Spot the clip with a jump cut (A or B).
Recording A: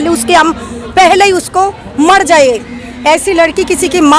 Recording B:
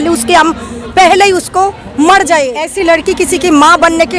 B